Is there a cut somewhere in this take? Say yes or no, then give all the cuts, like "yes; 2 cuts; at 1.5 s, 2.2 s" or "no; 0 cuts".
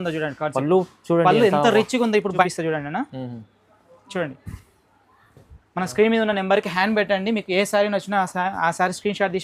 yes; 1 cut; at 2.4 s